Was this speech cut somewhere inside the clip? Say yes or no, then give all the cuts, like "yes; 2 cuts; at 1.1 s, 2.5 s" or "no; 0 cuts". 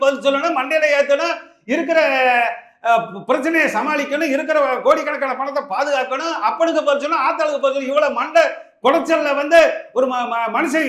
no; 0 cuts